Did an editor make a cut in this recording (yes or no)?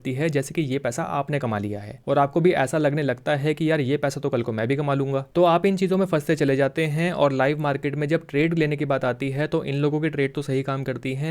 no